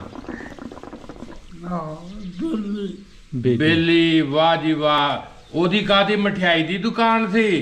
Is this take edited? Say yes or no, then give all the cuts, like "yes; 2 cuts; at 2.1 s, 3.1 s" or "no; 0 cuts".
no; 0 cuts